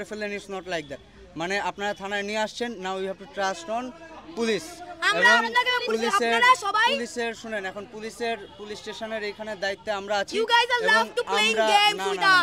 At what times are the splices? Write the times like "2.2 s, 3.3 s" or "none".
none